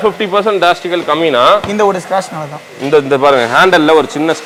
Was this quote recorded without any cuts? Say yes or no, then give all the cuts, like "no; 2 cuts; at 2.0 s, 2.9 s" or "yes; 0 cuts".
yes; 0 cuts